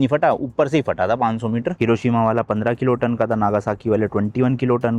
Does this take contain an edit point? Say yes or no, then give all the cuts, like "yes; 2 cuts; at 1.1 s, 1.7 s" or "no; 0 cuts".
yes; 1 cut; at 1.7 s